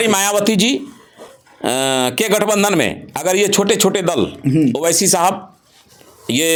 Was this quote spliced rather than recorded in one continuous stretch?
no; 0 cuts

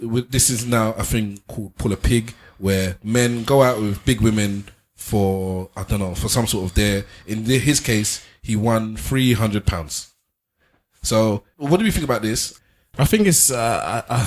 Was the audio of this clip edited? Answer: yes; 2 cuts; at 11.5 s, 12.6 s

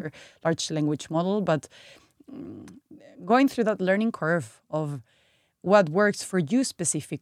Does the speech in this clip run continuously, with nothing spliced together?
yes; 0 cuts

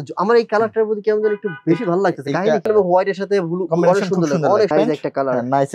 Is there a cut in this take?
yes; 2 cuts; at 2.7 s, 4.7 s

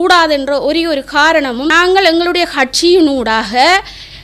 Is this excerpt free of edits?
no; 1 cut; at 1.7 s

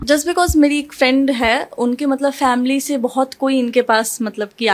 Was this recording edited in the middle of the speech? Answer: no; 0 cuts

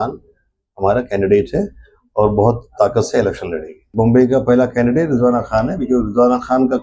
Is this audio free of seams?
no; 1 cut; at 3.9 s

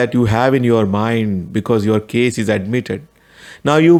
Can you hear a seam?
no; 0 cuts

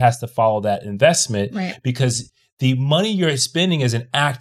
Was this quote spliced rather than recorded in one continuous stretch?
no; 0 cuts

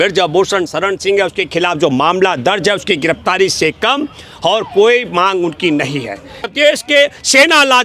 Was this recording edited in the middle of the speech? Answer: yes; 1 cut; at 6.5 s

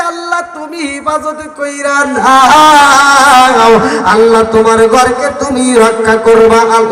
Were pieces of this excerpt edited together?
no; 0 cuts

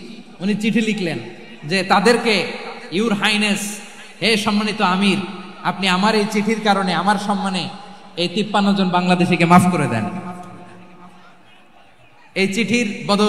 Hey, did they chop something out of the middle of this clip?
no; 0 cuts

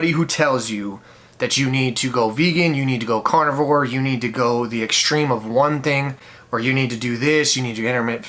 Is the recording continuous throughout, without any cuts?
yes; 0 cuts

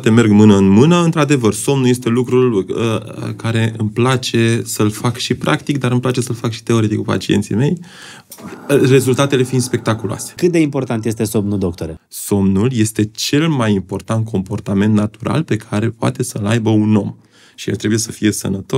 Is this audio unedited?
no; 2 cuts; at 10.3 s, 11.9 s

